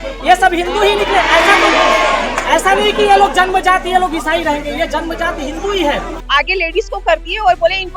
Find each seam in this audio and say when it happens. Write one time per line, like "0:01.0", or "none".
0:06.1